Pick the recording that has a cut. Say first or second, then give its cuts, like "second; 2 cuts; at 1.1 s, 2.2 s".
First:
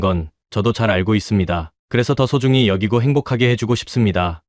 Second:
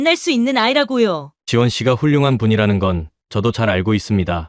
second; 1 cut; at 1.3 s